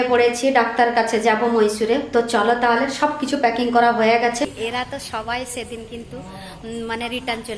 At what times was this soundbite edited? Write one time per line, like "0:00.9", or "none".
0:04.5